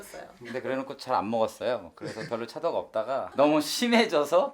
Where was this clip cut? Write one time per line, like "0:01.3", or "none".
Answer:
0:03.3